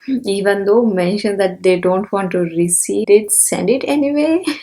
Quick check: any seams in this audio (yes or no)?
yes